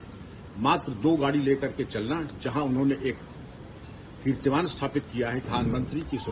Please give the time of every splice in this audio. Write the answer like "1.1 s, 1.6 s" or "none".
5.4 s

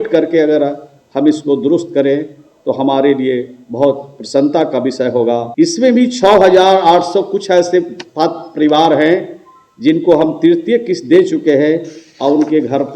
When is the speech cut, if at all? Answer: 5.5 s

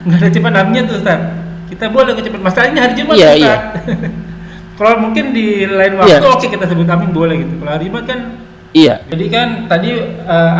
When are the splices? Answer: 9.1 s

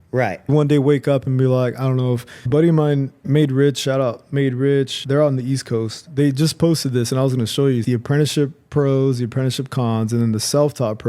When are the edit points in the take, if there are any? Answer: 2.3 s, 3.1 s

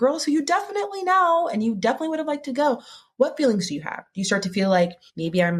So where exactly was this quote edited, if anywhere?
none

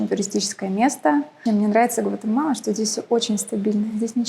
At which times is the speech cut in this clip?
1.4 s

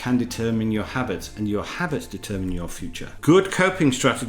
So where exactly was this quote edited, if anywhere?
3.2 s

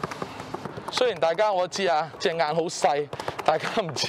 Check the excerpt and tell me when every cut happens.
0.9 s

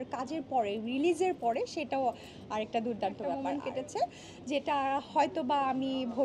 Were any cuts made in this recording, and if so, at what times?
3.4 s

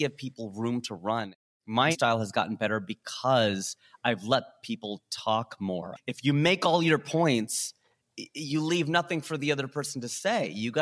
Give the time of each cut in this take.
1.9 s, 5.9 s

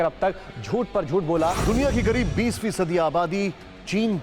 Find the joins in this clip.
1.6 s

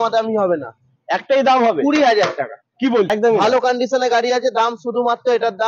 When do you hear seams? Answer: 3.1 s

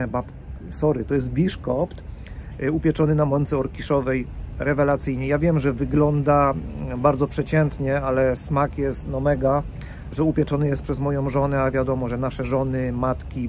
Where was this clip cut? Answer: none

